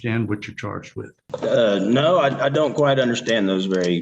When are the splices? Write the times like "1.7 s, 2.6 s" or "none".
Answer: 1.2 s